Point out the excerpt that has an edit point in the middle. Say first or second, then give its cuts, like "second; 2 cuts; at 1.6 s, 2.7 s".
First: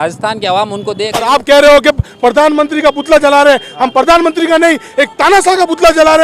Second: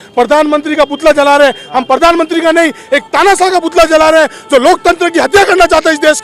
first; 1 cut; at 1.1 s